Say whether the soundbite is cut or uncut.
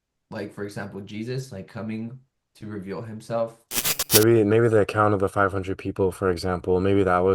cut